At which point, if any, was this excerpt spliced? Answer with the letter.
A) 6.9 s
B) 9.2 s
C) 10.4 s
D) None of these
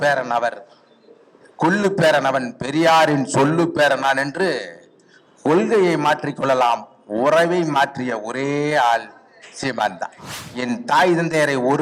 C